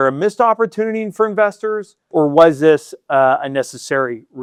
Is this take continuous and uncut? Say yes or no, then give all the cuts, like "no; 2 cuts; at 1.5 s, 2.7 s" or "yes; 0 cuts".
yes; 0 cuts